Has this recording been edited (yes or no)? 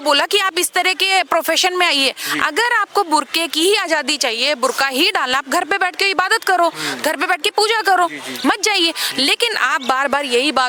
no